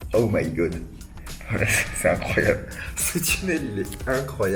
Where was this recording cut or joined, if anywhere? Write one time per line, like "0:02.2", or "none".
none